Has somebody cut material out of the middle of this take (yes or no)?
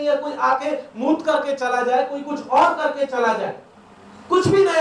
no